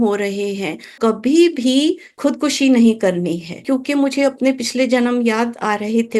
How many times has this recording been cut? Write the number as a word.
three